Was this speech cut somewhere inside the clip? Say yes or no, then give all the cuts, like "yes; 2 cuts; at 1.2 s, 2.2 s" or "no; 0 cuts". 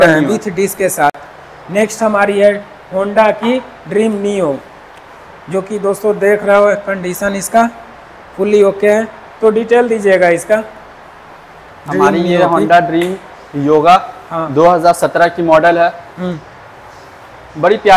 no; 0 cuts